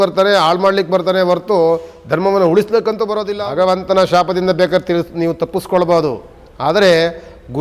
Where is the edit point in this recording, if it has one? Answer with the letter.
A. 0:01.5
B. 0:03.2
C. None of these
B